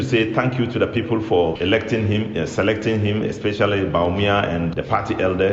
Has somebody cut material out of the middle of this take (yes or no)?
no